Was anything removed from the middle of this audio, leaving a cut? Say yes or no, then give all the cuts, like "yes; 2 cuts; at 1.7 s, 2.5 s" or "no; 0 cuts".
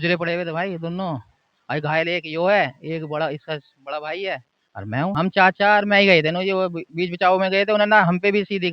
yes; 1 cut; at 5.1 s